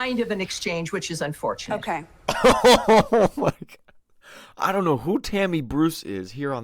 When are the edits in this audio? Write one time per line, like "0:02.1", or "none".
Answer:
0:02.1